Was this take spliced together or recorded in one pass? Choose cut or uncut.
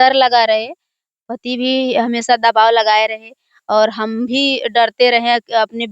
uncut